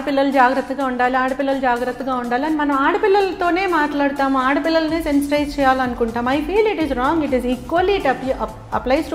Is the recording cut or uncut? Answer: uncut